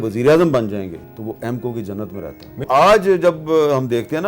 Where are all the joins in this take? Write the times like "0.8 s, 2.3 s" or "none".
1.1 s, 2.7 s